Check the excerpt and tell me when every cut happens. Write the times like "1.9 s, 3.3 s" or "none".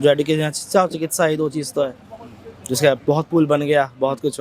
none